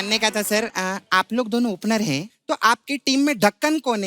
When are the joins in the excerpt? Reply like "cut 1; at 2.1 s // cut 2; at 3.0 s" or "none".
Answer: cut 1; at 2.3 s